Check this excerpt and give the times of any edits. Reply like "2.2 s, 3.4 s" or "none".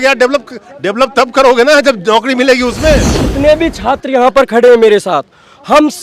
3.1 s